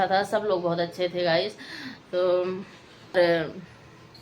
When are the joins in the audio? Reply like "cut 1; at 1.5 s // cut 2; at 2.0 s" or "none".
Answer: cut 1; at 3.1 s